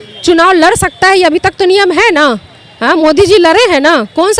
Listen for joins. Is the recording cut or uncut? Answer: uncut